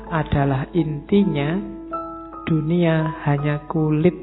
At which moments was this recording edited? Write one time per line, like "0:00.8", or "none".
0:00.9